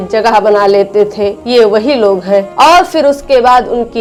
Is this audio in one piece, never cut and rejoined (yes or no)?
yes